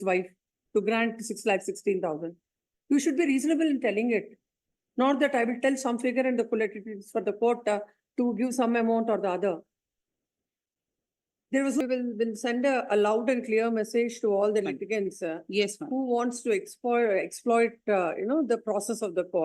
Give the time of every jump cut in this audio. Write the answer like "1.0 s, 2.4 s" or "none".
11.8 s